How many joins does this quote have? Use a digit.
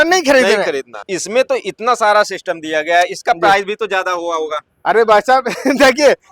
1